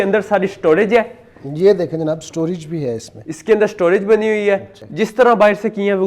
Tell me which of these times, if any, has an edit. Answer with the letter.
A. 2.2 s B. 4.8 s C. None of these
B